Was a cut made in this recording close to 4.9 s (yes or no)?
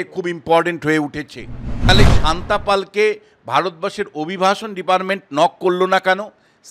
no